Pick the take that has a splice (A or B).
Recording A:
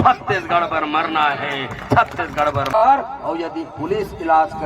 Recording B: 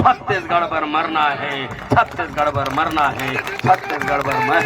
A